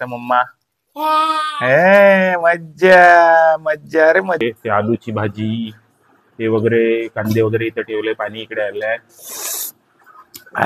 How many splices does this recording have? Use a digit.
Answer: 1